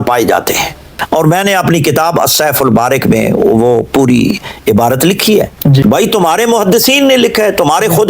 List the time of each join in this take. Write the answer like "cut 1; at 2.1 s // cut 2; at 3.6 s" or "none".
cut 1; at 0.9 s // cut 2; at 5.8 s